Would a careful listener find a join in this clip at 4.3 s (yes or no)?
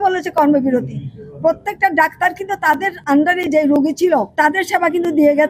yes